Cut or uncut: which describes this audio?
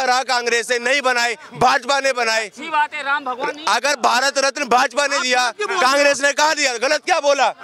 uncut